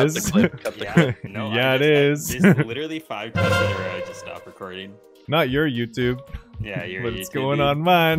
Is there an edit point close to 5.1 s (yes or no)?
yes